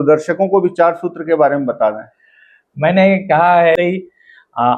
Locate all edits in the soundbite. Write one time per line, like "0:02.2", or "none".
0:03.8